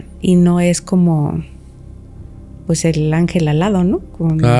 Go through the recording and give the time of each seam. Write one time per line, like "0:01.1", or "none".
none